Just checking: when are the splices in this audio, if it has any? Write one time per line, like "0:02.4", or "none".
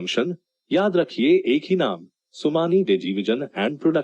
none